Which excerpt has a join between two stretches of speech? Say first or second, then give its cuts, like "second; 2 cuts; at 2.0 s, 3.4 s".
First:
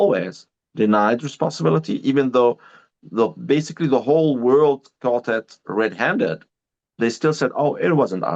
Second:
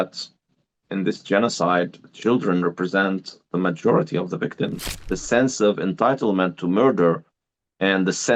second; 1 cut; at 4.8 s